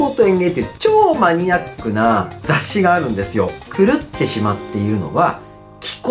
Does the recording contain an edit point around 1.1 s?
no; 2 cuts; at 2.3 s, 3.6 s

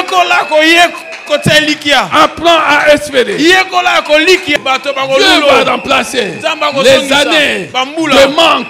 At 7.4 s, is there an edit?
no; 1 cut; at 4.6 s

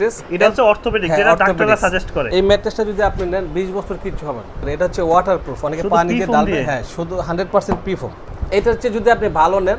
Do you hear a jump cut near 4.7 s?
yes; 3 cuts; at 2.2 s, 4.7 s, 8.3 s

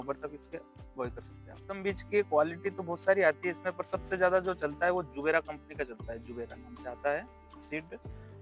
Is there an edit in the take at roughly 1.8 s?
yes; 1 cut; at 1.8 s

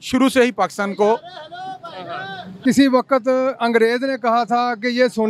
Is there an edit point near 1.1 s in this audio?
no; 1 cut; at 2.5 s

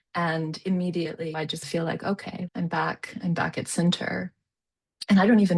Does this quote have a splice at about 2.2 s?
no; 0 cuts

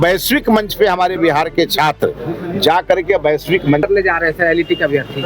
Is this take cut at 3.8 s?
yes; 1 cut; at 3.8 s

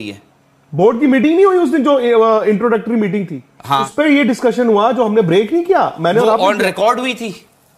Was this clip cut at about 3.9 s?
yes; 1 cut; at 3.9 s

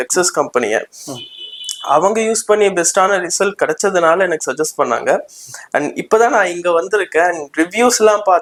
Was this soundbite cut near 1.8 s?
no; 0 cuts

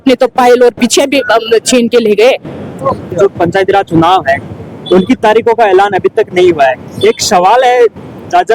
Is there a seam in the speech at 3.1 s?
yes; 1 cut; at 3.1 s

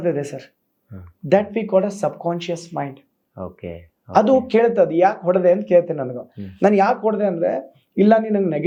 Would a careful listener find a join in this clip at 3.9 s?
no; 0 cuts

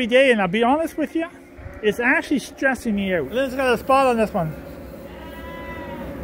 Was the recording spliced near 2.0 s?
no; 1 cut; at 3.3 s

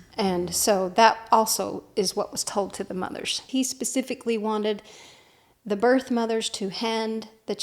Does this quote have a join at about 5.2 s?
no; 1 cut; at 3.4 s

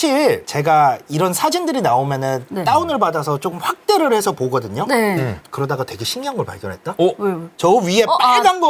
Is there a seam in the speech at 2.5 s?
yes; 2 cuts; at 2.5 s, 7.5 s

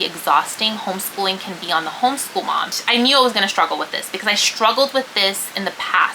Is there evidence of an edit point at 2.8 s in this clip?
yes; 1 cut; at 2.8 s

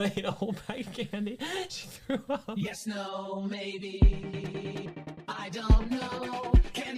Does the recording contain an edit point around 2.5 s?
yes; 1 cut; at 2.5 s

